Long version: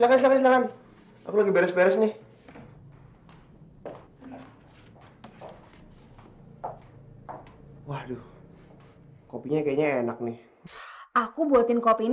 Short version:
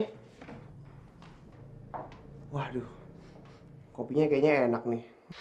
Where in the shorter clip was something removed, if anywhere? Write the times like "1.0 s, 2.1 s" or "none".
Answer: 1.6 s